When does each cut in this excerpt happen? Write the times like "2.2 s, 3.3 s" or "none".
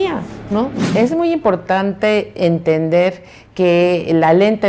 0.9 s